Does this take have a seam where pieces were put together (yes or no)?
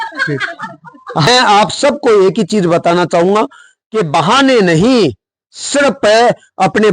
yes